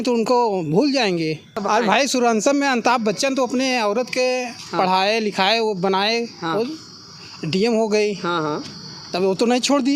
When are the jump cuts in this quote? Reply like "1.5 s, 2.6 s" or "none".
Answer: 1.5 s